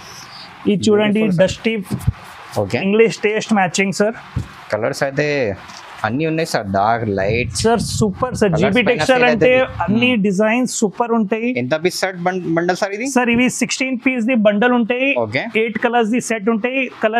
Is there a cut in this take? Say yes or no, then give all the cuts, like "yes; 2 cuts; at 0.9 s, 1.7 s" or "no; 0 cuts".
no; 0 cuts